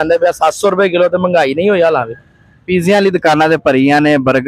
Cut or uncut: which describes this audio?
uncut